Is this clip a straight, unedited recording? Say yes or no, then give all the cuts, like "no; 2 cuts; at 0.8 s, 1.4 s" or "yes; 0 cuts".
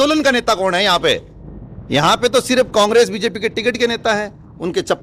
yes; 0 cuts